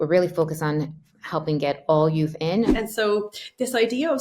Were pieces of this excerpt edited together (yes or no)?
yes